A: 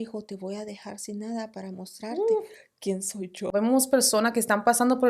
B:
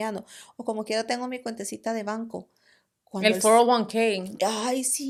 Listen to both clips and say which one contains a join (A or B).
A